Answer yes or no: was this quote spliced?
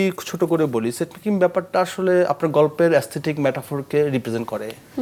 no